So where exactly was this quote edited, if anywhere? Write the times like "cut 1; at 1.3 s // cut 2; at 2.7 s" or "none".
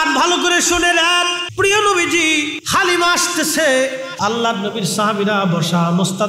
cut 1; at 1.4 s // cut 2; at 2.6 s // cut 3; at 4.1 s